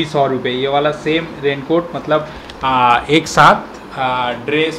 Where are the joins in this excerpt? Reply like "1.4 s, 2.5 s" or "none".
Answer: none